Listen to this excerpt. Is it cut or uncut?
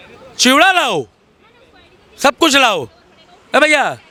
uncut